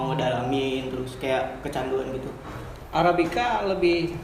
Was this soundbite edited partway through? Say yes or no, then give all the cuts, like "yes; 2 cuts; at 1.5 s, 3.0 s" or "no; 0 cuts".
yes; 1 cut; at 2.5 s